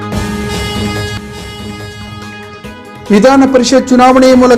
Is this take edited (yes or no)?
yes